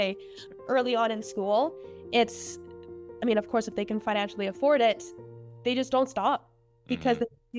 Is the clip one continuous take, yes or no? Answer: yes